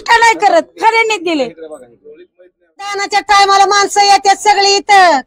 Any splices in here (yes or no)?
yes